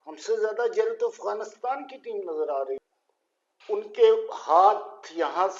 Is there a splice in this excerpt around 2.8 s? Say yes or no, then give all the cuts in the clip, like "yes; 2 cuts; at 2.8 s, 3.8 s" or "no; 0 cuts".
yes; 1 cut; at 2.8 s